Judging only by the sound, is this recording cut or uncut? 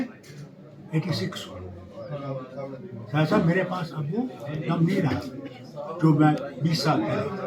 uncut